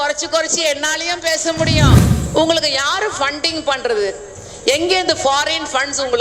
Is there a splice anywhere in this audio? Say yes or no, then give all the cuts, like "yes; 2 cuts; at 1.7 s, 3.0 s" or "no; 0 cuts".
yes; 1 cut; at 2.1 s